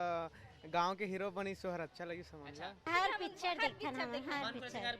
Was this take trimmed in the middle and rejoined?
yes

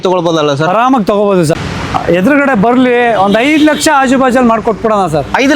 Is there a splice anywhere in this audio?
yes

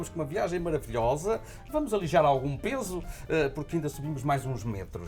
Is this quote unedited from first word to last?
yes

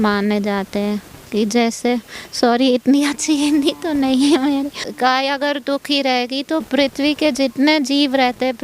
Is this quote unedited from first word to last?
no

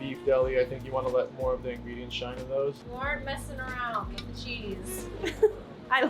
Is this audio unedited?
no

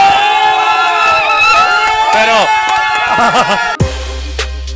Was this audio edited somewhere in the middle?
yes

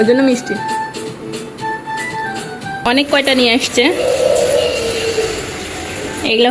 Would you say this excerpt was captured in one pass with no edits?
no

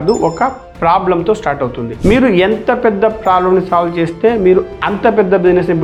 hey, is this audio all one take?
yes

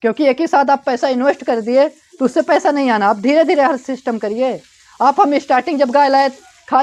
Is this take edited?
no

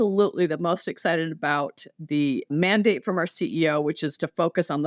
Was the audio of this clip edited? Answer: no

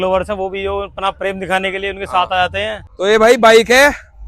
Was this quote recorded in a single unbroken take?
no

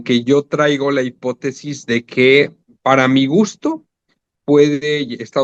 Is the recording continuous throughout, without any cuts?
yes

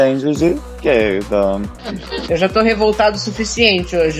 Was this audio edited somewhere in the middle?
yes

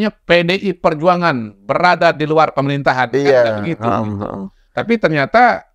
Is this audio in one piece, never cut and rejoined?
yes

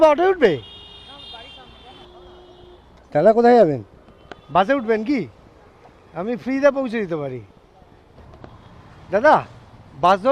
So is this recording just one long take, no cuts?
no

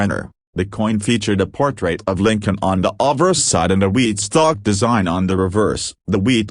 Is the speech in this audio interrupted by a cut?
yes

